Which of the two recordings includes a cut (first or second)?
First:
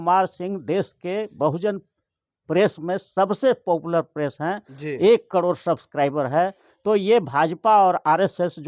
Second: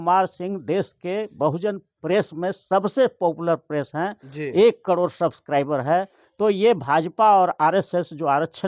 second